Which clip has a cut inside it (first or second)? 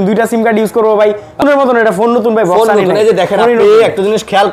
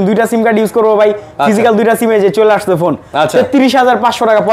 first